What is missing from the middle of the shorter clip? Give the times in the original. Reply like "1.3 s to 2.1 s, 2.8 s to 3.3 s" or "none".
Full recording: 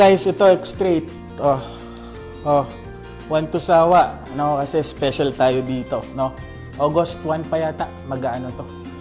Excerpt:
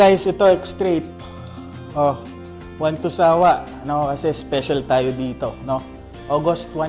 1.2 s to 1.7 s

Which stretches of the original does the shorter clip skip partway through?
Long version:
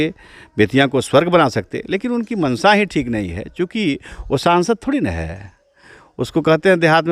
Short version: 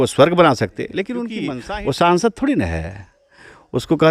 2.3 s to 3.8 s

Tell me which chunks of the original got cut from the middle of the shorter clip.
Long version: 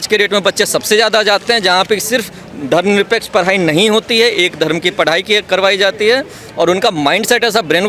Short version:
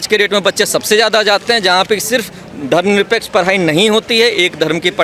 none

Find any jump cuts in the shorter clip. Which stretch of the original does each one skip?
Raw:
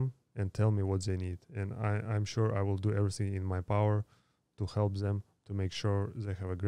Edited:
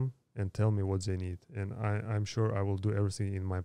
none

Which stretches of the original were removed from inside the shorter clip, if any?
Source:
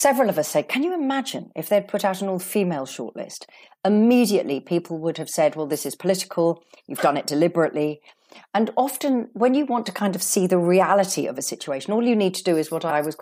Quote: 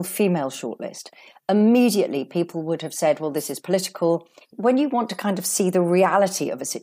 6.9 s to 9.3 s

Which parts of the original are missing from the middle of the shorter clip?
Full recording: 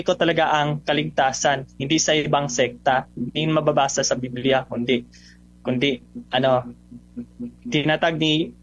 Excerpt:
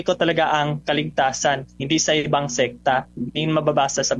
none

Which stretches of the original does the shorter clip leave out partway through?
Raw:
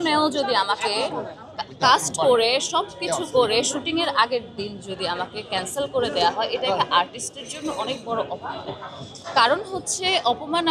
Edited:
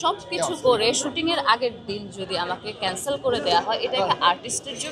none

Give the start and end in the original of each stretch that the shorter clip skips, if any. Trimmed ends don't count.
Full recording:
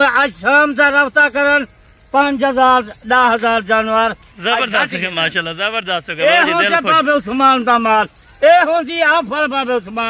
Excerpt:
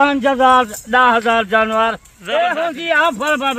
4.3 s to 8.2 s

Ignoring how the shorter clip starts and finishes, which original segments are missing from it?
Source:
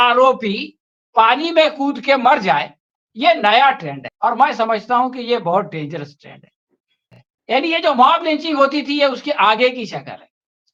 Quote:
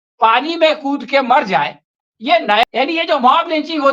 3.6 s to 7.4 s

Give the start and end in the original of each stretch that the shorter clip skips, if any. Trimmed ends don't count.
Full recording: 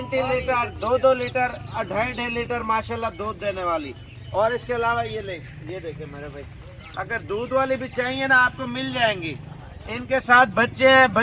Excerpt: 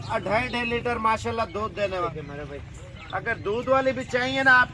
3.7 s to 5.9 s

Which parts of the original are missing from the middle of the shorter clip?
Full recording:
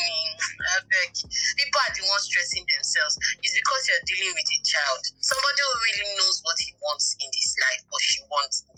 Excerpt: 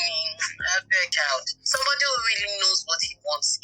1.1 s to 4.7 s

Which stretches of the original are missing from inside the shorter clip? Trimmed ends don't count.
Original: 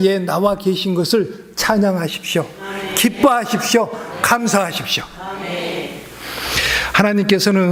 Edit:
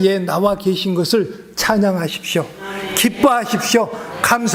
none

